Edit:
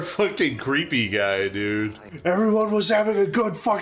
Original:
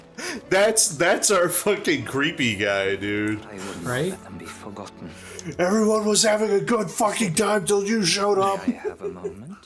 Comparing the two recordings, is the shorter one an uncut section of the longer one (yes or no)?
no